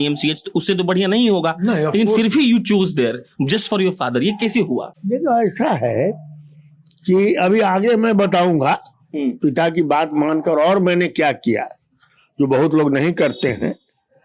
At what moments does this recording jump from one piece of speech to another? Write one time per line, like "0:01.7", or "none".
none